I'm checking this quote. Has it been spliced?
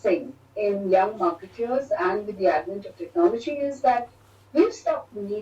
no; 0 cuts

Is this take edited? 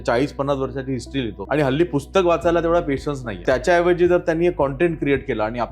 yes; 2 cuts; at 1.4 s, 3.4 s

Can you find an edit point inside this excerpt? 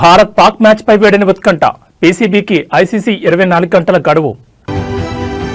yes; 1 cut; at 4.6 s

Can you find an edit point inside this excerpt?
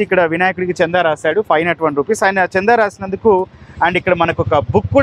no; 0 cuts

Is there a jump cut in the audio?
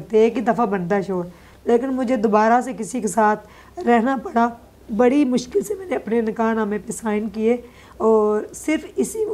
no; 0 cuts

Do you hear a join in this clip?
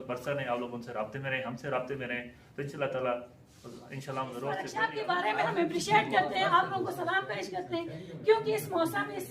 yes; 1 cut; at 4.7 s

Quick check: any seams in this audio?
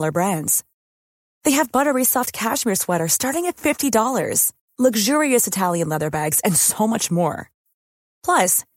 no; 0 cuts

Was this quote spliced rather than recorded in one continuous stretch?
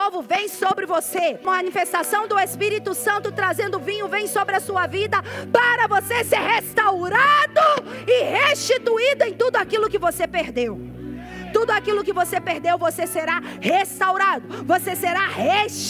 yes; 1 cut; at 1.4 s

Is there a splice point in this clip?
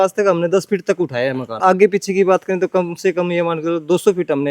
yes; 1 cut; at 1.6 s

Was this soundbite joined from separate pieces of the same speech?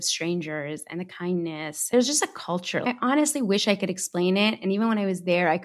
yes; 2 cuts; at 1.9 s, 2.8 s

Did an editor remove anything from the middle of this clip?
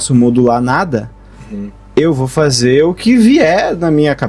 no; 0 cuts

